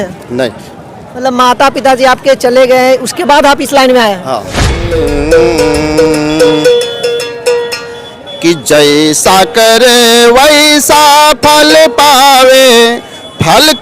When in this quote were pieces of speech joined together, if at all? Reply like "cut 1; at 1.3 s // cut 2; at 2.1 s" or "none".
cut 1; at 4.9 s

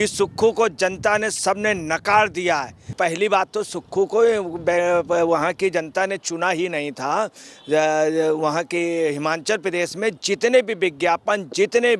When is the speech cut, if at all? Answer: cut 1; at 2.8 s

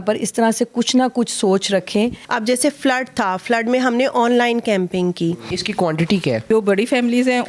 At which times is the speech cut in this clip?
cut 1; at 2.3 s // cut 2; at 5.6 s // cut 3; at 6.4 s

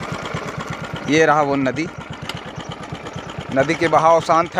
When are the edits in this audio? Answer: none

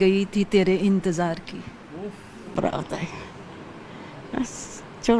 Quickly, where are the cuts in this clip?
cut 1; at 2.5 s

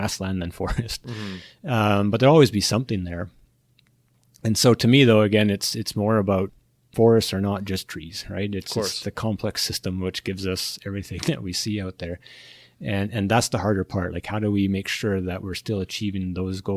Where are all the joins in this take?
cut 1; at 6.8 s

